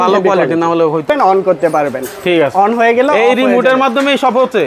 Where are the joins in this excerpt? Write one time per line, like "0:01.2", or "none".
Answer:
0:01.0